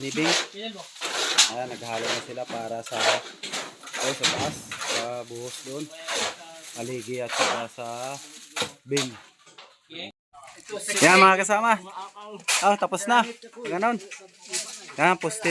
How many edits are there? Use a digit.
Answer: 1